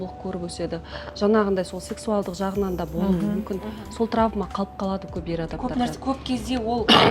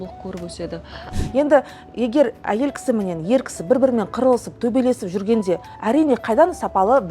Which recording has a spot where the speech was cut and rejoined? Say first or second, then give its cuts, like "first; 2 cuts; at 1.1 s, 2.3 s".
second; 1 cut; at 1.1 s